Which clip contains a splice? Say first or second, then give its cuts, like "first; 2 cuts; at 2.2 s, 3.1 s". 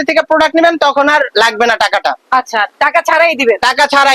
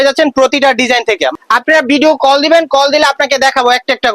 second; 1 cut; at 1.3 s